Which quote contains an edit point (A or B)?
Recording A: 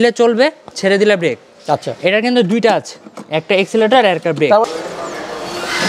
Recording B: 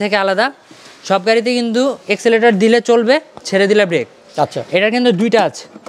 A